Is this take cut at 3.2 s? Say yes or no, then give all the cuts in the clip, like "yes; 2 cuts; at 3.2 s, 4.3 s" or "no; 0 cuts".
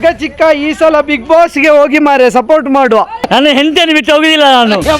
yes; 1 cut; at 3.2 s